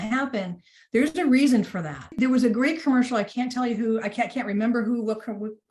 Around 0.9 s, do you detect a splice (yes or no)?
no